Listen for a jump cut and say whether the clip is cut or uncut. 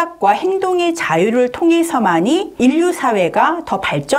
cut